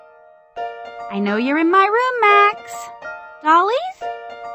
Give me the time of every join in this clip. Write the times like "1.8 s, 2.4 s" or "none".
1.1 s